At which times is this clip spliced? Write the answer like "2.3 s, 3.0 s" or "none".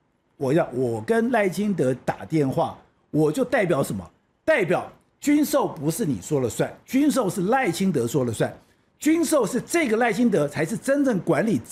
none